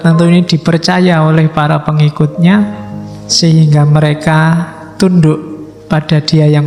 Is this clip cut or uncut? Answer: uncut